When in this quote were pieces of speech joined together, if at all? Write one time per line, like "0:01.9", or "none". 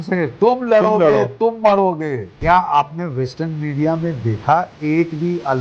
0:02.3